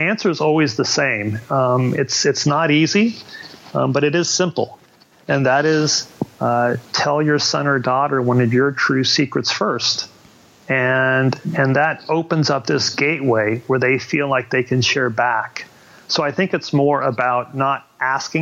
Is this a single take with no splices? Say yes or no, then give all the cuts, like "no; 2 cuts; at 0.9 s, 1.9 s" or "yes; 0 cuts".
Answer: yes; 0 cuts